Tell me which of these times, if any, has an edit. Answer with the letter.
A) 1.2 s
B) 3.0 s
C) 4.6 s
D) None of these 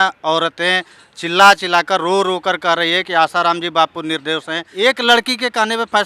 C